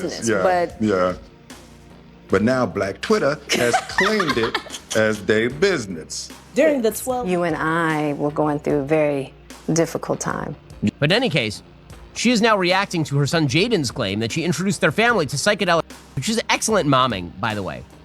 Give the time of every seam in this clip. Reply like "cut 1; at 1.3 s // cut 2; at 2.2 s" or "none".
cut 1; at 10.9 s